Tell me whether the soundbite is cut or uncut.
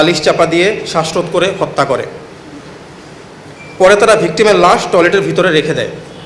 uncut